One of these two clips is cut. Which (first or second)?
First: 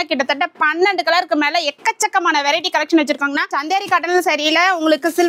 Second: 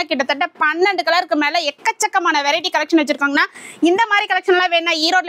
first